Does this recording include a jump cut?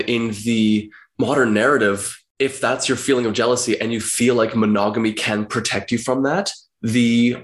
no; 0 cuts

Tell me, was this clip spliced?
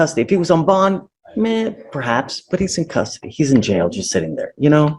yes; 1 cut; at 3.2 s

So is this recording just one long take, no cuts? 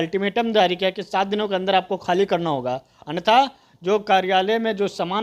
yes; 0 cuts

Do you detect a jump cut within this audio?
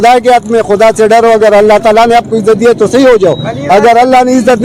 no; 0 cuts

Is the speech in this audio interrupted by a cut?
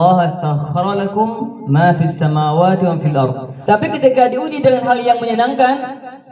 yes; 1 cut; at 3.1 s

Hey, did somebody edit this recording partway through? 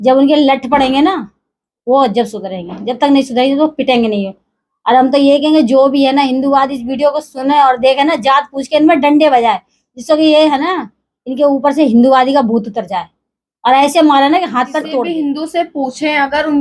yes; 1 cut; at 15.1 s

